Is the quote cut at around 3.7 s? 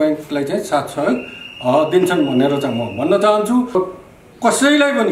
yes; 1 cut; at 3.7 s

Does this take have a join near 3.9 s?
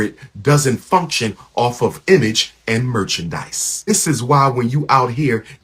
yes; 1 cut; at 3.9 s

